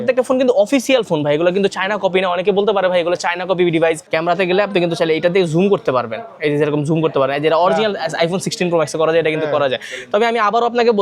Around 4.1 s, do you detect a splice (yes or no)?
yes